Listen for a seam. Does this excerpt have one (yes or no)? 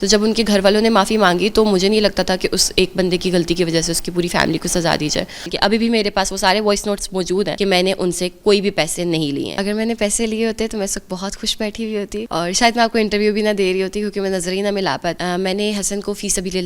yes